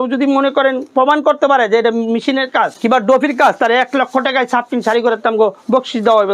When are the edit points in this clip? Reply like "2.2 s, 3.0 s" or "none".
2.7 s